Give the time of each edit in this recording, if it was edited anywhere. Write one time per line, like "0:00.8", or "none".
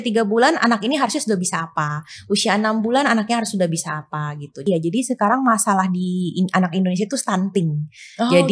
0:04.6